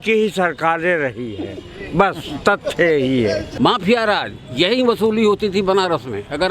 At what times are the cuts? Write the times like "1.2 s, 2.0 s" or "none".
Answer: 3.5 s